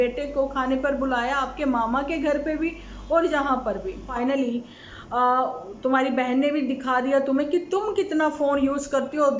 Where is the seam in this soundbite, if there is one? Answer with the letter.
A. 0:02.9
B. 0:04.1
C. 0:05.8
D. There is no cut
B